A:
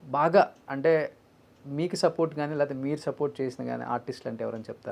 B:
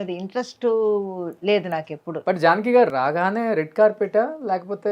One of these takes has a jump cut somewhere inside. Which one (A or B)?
B